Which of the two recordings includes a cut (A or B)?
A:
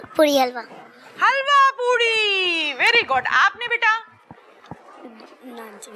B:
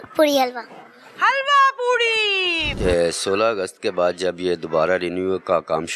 B